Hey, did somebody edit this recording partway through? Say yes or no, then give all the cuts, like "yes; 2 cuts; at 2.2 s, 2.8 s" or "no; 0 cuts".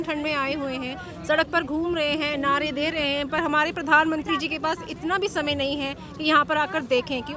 no; 0 cuts